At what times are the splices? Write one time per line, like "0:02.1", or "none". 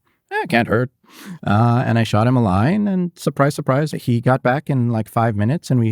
0:03.9